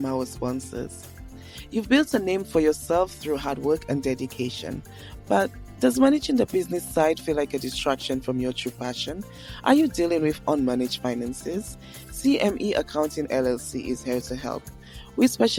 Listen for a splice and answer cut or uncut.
uncut